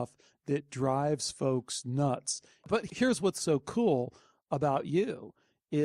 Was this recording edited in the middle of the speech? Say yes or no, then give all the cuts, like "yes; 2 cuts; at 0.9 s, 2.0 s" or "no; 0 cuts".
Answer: yes; 1 cut; at 2.8 s